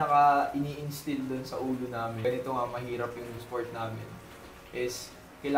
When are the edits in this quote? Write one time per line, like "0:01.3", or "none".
0:02.2
0:03.4